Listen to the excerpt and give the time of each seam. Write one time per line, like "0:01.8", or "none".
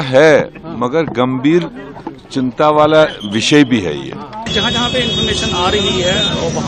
0:04.5

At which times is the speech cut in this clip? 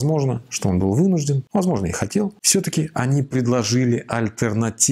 0:01.4
0:02.4

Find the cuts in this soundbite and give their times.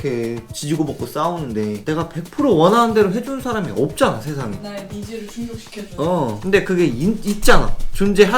0:01.8
0:04.6
0:06.4

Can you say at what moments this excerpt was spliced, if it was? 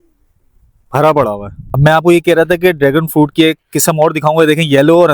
0:01.8

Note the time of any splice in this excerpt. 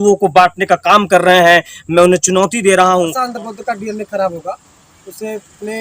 0:03.2

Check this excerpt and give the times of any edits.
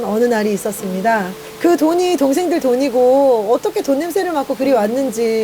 0:01.4

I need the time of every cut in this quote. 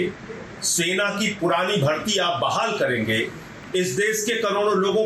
0:03.4

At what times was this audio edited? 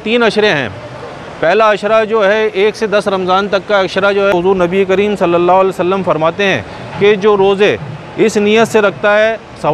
0:04.3

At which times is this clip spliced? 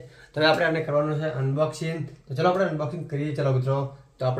none

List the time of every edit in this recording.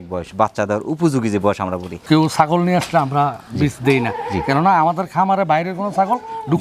0:02.0

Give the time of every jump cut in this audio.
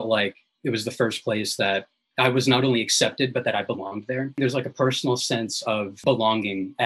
0:04.4
0:06.0

